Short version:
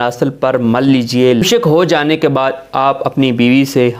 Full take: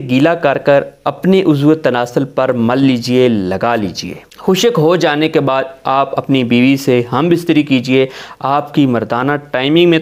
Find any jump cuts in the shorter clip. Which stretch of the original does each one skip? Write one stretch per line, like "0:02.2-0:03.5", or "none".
0:03.4-0:04.5